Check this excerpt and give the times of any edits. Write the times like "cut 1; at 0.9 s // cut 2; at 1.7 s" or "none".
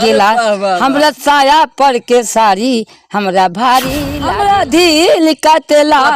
cut 1; at 4.2 s